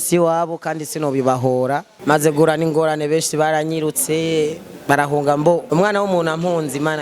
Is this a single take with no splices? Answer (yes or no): no